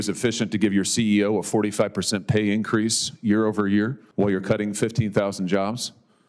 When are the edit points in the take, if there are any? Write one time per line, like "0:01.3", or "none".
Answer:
0:04.0

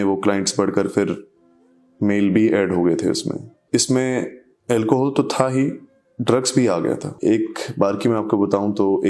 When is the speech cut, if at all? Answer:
0:03.5
0:07.1

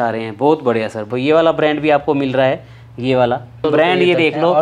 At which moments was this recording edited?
0:01.1
0:03.6

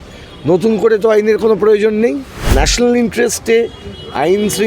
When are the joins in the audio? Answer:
0:02.3

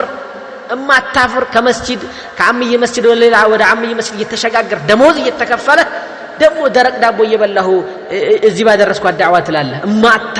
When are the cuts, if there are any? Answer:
none

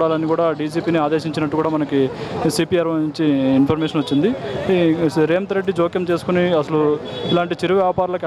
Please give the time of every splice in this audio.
none

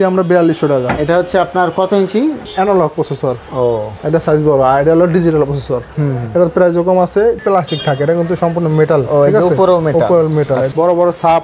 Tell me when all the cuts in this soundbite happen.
0:02.4
0:07.4
0:10.7

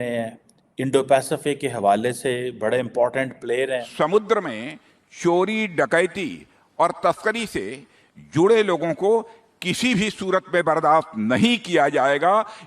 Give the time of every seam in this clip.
0:03.9

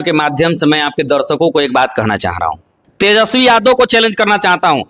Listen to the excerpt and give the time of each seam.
0:02.8

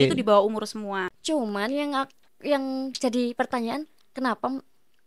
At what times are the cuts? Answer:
0:01.1

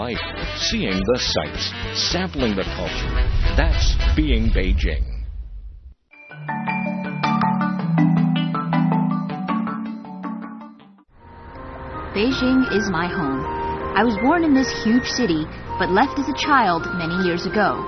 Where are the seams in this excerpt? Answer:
0:11.6

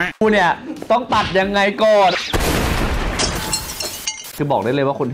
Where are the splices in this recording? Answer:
0:02.1
0:04.4

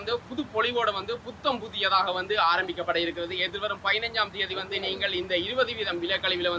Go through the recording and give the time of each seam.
none

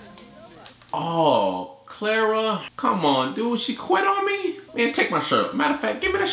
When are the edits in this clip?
0:02.7
0:04.6

